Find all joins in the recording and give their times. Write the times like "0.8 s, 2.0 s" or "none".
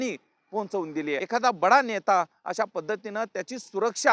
1.2 s